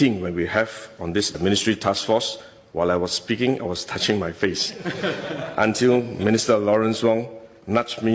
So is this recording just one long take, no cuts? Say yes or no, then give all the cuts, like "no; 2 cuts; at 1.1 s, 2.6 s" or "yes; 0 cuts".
yes; 0 cuts